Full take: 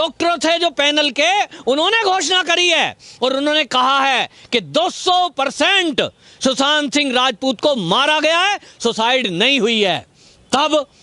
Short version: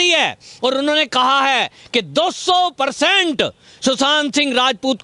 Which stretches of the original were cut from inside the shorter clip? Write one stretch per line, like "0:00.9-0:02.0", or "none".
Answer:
none